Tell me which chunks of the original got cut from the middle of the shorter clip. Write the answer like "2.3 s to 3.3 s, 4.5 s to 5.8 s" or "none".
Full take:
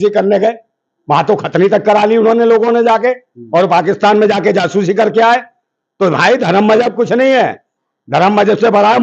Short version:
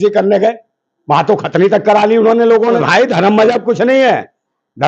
2.8 s to 6.1 s